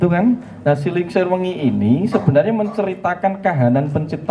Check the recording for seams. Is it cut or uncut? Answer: uncut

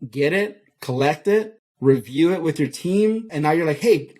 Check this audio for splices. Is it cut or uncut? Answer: cut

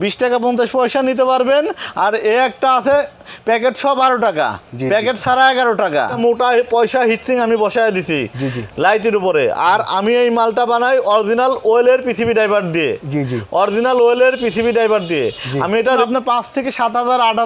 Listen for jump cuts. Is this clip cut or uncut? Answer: cut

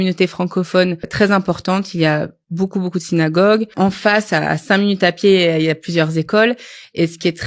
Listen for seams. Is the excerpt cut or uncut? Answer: cut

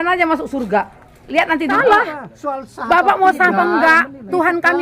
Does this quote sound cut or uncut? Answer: cut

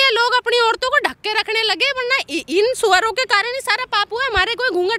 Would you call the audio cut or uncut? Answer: uncut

